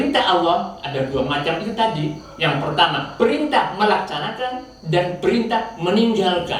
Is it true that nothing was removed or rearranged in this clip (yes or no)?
yes